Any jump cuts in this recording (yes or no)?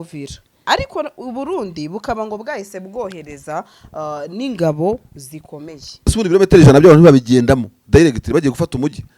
yes